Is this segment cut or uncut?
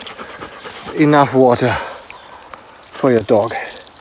uncut